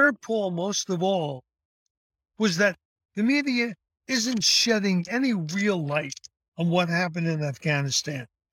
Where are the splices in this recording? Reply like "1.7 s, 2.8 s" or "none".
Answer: 4.5 s